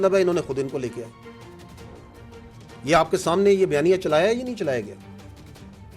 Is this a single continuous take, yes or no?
yes